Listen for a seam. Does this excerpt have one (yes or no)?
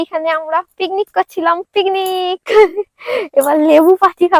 no